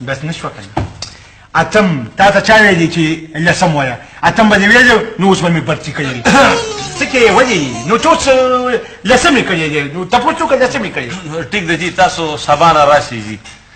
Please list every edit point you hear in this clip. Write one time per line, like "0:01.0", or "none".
none